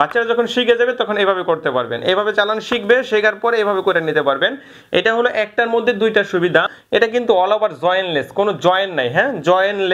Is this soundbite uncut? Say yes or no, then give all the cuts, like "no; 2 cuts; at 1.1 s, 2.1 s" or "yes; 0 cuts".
no; 1 cut; at 6.8 s